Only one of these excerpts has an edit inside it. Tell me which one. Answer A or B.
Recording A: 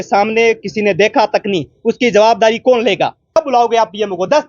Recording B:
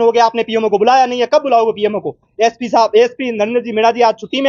A